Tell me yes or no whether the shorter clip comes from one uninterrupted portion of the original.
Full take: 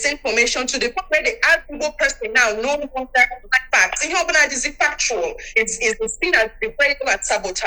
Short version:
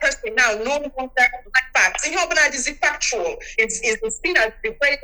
yes